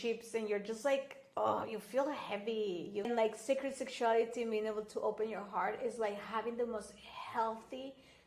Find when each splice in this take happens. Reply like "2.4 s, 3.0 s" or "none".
3.1 s